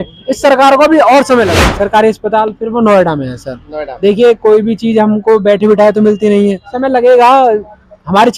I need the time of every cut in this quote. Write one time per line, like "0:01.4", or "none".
0:01.6
0:06.7